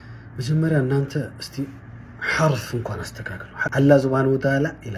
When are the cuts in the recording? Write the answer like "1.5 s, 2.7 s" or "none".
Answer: 3.5 s